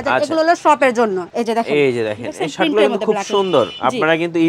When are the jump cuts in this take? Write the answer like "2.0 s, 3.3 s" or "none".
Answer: 1.3 s